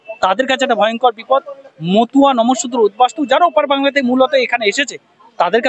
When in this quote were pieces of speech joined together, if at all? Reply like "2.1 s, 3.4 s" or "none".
none